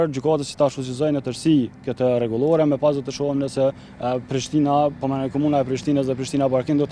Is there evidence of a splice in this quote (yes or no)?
no